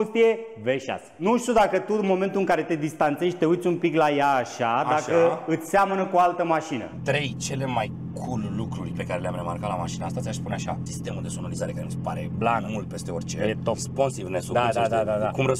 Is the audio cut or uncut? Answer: cut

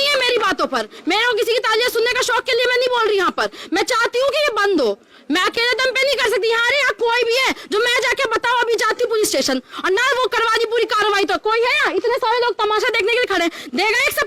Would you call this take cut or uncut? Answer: uncut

